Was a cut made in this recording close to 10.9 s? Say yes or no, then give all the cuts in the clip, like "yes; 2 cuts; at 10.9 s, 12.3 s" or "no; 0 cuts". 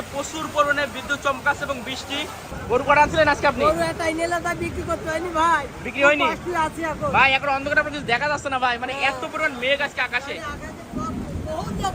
no; 1 cut; at 2.5 s